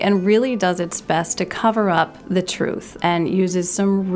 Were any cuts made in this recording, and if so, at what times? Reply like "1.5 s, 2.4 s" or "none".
2.7 s